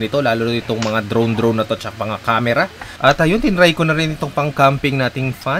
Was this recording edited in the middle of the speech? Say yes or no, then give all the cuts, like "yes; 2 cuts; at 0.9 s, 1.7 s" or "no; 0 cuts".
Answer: yes; 1 cut; at 2.8 s